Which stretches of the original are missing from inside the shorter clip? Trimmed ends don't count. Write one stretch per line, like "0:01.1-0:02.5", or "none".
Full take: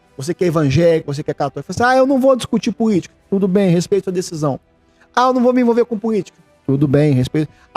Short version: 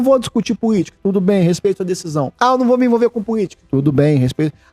0:03.1-0:03.2
0:04.6-0:05.1
0:06.3-0:06.5